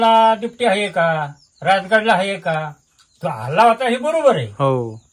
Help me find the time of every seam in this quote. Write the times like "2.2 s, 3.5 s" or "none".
none